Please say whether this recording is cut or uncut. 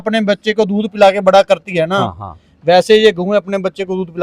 uncut